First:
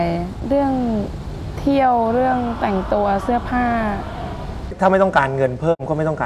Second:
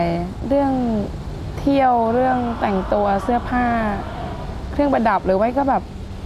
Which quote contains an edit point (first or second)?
first